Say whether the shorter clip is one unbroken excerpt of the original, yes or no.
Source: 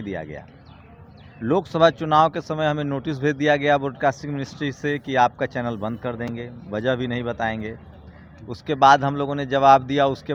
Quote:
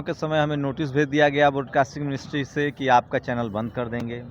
yes